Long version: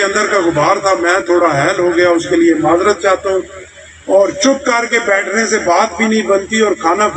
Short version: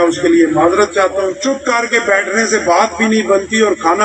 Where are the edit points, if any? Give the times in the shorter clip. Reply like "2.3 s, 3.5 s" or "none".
1.4 s